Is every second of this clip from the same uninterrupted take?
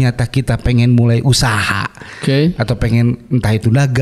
yes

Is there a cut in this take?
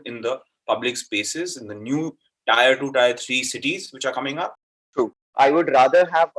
yes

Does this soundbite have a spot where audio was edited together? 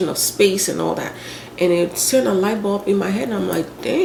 no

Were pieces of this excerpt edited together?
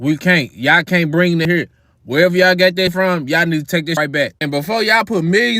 yes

